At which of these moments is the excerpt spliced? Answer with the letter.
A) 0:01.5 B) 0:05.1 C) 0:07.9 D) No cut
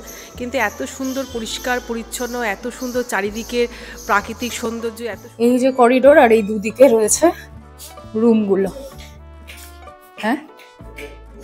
B